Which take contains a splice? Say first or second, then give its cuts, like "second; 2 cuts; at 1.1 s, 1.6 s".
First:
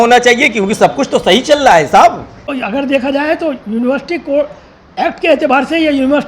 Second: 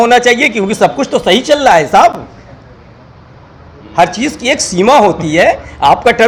first; 1 cut; at 2.5 s